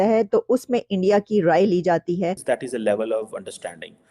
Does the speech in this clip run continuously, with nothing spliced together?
no; 1 cut; at 2.4 s

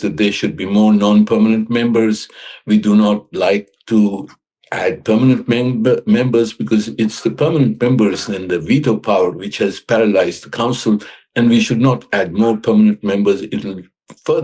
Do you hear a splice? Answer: no; 0 cuts

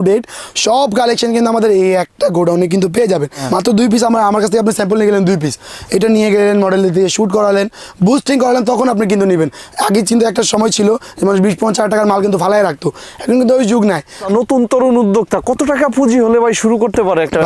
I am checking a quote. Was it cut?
yes; 2 cuts; at 3.4 s, 14.2 s

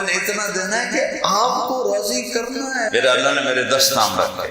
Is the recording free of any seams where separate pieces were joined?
no; 1 cut; at 2.9 s

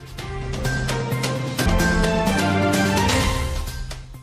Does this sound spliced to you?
yes; 1 cut; at 1.7 s

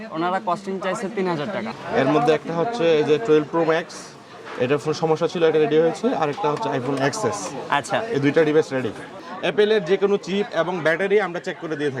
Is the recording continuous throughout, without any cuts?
no; 2 cuts; at 1.7 s, 9.2 s

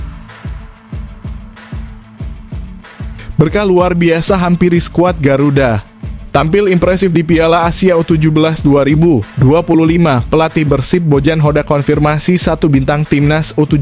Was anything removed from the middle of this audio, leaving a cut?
no; 0 cuts

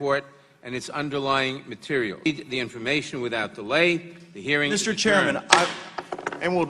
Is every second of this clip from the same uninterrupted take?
no; 1 cut; at 2.3 s

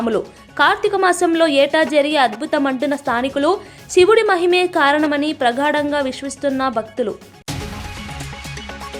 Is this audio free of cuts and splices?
yes; 0 cuts

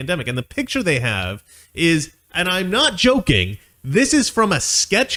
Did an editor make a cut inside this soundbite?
no; 0 cuts

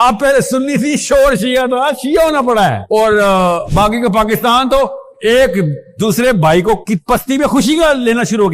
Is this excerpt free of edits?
no; 1 cut; at 3.6 s

